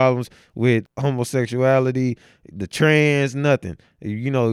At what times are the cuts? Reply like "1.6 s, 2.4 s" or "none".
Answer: 0.9 s